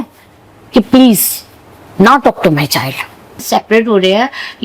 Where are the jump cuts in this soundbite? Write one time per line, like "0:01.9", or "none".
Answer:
0:03.4